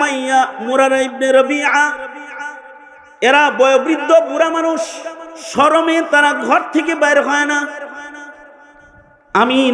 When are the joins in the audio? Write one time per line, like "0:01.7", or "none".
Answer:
none